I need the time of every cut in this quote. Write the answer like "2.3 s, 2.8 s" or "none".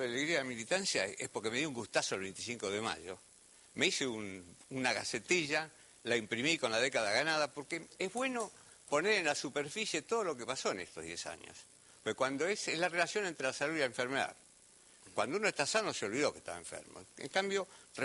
none